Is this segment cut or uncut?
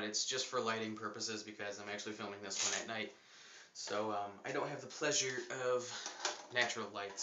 uncut